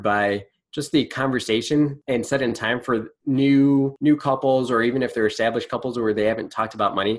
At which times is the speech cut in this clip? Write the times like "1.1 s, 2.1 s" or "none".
2.0 s, 3.1 s, 3.9 s

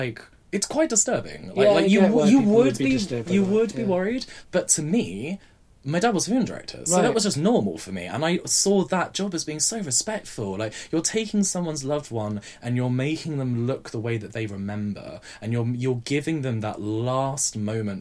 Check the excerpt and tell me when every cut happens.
4.4 s

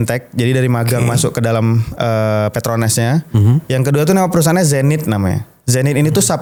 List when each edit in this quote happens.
none

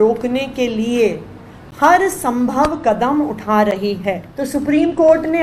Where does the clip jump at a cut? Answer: 4.3 s

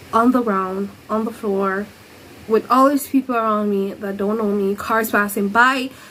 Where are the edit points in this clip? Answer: none

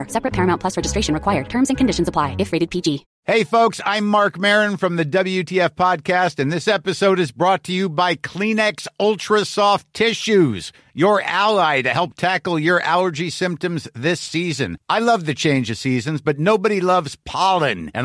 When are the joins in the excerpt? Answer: 3.1 s

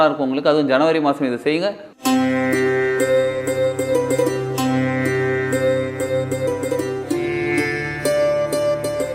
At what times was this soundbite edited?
1.9 s

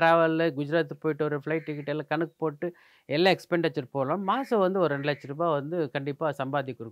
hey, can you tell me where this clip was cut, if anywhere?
none

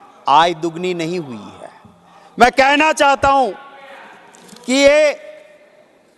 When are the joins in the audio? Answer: none

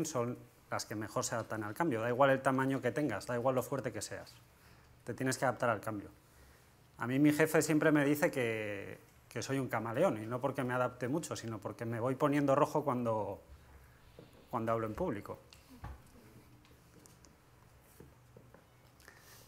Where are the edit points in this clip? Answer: 7.7 s

